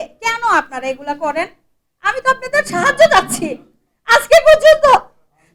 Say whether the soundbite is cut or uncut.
uncut